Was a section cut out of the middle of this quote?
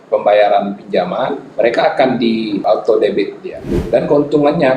yes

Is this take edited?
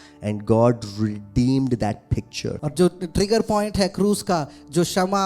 yes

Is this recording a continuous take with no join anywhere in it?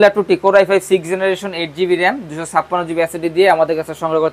yes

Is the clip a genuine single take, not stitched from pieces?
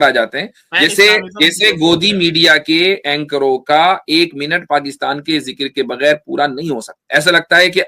no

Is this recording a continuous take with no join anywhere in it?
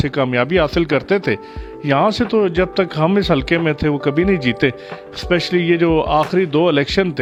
yes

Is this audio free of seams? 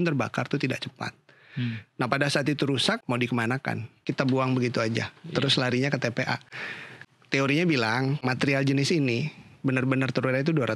no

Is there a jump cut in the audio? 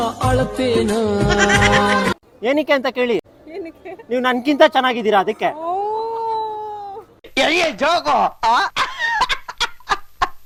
no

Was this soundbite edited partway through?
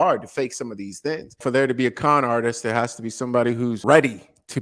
yes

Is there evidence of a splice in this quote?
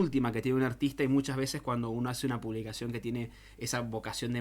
no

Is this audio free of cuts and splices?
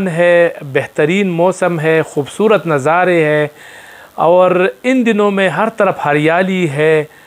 yes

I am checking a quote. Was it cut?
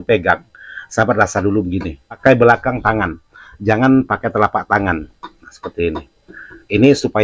yes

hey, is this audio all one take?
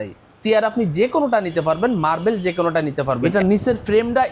no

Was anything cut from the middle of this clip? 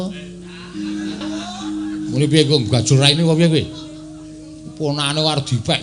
yes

